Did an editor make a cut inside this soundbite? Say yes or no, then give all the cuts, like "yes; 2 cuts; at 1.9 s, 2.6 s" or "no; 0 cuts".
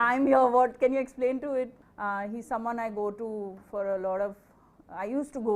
yes; 1 cut; at 1.8 s